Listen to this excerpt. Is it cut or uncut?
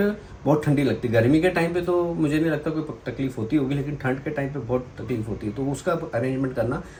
uncut